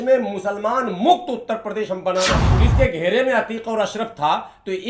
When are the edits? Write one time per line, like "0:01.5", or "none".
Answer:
0:02.5